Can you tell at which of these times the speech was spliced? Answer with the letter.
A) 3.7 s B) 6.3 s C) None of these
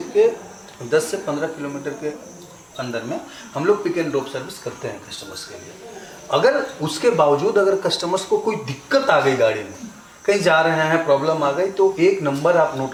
C